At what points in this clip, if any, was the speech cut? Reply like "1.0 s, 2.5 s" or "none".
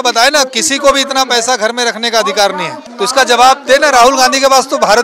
2.8 s